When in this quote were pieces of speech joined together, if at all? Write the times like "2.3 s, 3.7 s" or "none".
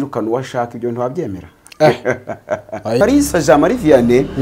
3.0 s